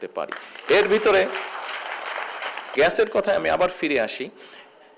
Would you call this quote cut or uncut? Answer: cut